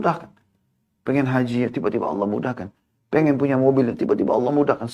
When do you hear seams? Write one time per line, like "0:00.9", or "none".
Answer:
none